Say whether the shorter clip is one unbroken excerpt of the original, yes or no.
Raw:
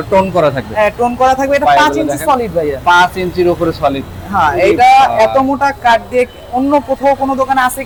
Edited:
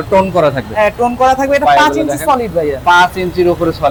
yes